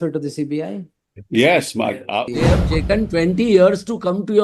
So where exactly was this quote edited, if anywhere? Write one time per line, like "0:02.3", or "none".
0:02.3